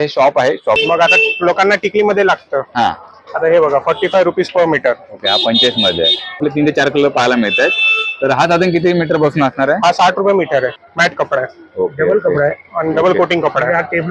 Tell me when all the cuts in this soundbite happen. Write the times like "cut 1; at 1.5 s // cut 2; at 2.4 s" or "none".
cut 1; at 0.8 s // cut 2; at 6.4 s // cut 3; at 10.8 s